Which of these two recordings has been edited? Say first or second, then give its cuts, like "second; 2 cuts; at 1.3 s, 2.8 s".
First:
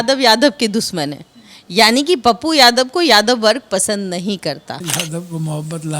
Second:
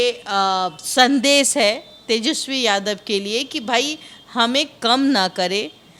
first; 1 cut; at 4.8 s